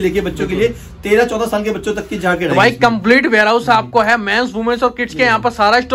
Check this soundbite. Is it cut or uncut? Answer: uncut